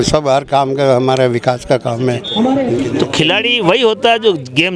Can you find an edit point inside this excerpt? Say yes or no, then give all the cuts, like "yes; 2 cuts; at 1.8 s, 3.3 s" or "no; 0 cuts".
yes; 1 cut; at 2.9 s